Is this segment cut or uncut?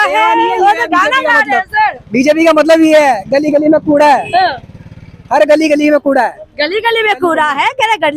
uncut